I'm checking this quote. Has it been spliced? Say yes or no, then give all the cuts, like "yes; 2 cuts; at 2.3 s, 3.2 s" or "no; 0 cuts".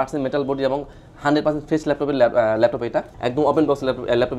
yes; 1 cut; at 3.1 s